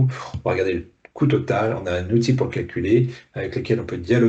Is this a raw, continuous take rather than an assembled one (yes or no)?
yes